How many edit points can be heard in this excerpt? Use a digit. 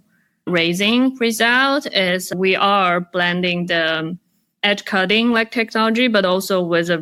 0